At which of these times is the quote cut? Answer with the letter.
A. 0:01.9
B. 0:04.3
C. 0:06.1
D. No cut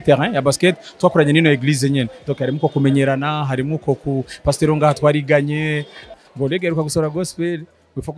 C